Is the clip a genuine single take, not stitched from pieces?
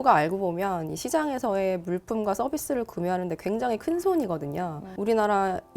no; 1 cut; at 4.8 s

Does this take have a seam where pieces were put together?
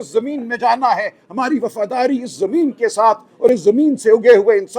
no; 0 cuts

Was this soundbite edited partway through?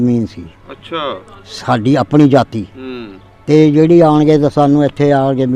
no; 0 cuts

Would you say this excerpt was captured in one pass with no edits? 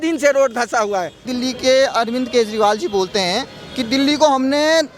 no; 1 cut; at 1.3 s

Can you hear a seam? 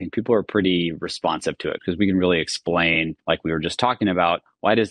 yes; 2 cuts; at 1.8 s, 3.1 s

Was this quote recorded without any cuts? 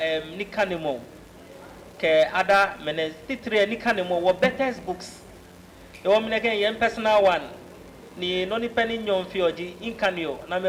yes; 0 cuts

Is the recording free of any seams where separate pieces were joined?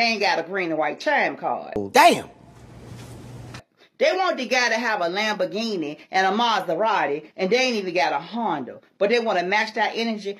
yes; 0 cuts

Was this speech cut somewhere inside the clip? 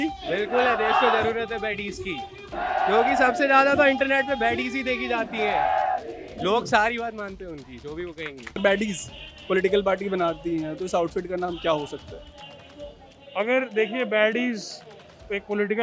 yes; 2 cuts; at 2.5 s, 8.5 s

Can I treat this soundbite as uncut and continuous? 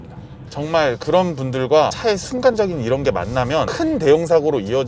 yes; 0 cuts

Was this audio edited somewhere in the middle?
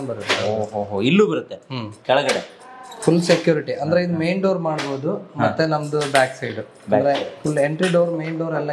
no; 0 cuts

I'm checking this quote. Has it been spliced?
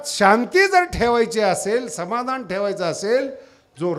no; 0 cuts

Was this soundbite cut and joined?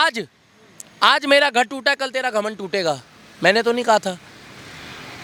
no; 0 cuts

